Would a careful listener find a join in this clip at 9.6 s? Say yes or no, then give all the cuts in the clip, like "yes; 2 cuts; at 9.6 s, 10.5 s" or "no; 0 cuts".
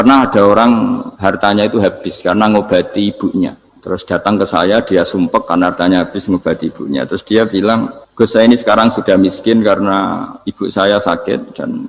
no; 3 cuts; at 1.1 s, 3.7 s, 8.0 s